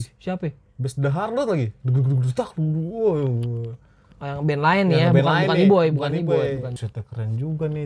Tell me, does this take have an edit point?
yes; 1 cut; at 6.7 s

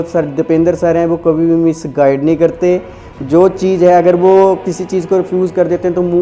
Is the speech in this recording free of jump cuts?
yes; 0 cuts

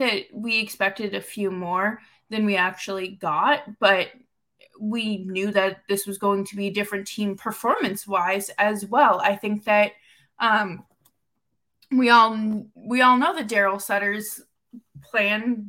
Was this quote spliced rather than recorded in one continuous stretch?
no; 0 cuts

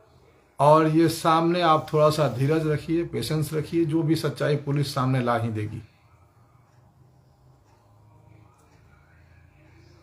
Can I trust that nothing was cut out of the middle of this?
yes; 0 cuts

